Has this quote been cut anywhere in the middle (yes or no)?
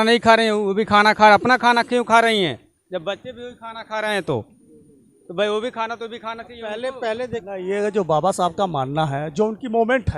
yes